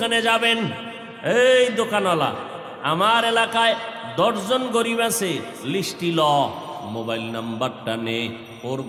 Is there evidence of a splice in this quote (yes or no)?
no